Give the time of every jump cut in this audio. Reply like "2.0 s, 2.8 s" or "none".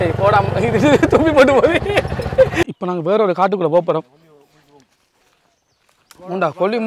2.8 s